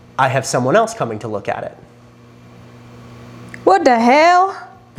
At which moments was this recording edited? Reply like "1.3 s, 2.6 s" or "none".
none